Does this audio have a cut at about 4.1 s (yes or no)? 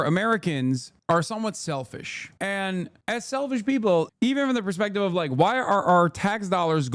yes